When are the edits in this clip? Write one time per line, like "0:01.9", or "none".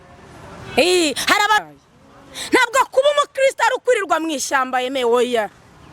0:01.6